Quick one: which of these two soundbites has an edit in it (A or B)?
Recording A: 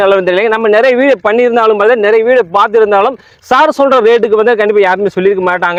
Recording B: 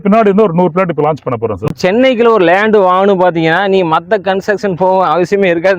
B